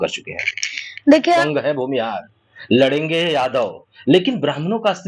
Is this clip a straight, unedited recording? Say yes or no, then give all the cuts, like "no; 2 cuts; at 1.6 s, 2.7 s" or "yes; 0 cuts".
no; 1 cut; at 1.4 s